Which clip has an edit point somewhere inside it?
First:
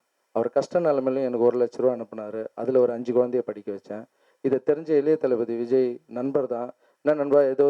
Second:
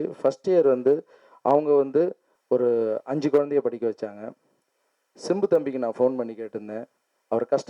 second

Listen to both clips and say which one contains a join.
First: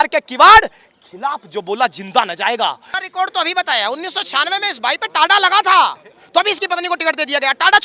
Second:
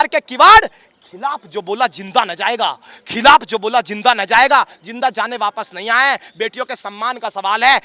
first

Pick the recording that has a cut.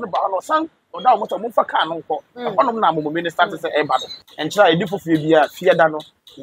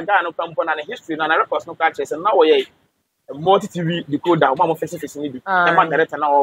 first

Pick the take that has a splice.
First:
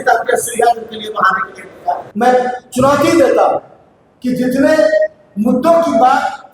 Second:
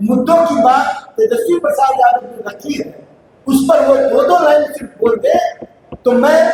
first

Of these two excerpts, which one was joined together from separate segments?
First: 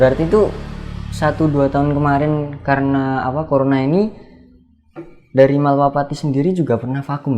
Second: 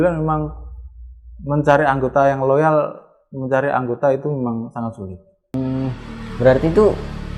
second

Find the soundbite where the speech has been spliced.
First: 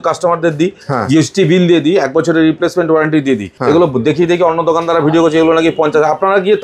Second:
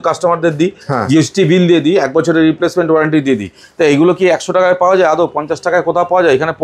first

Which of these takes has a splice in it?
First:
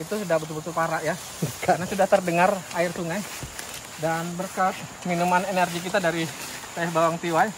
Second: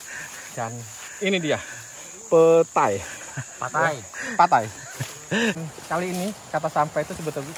second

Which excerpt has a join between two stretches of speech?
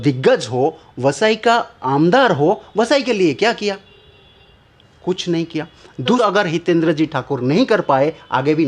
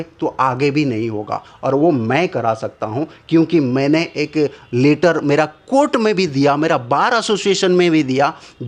first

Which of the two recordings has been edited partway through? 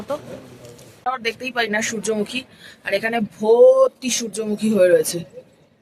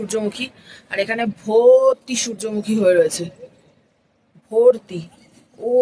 first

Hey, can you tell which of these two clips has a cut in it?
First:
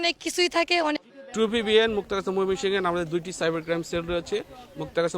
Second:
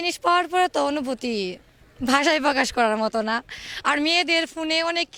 first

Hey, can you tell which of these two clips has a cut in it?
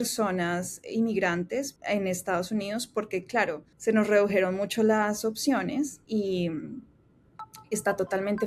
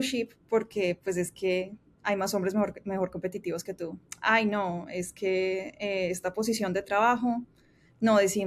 first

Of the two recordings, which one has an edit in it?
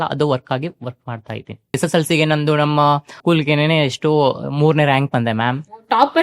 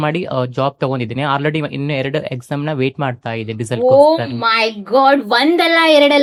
first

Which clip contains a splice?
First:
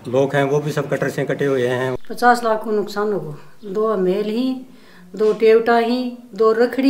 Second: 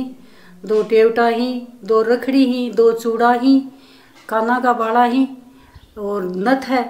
first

